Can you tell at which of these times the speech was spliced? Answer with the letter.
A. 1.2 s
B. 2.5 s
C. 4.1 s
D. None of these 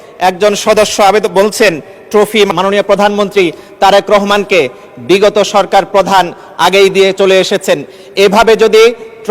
B